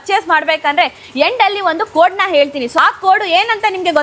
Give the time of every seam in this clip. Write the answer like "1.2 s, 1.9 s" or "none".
none